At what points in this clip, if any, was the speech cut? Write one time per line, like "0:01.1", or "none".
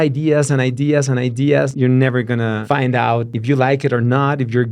0:01.7
0:02.6
0:03.3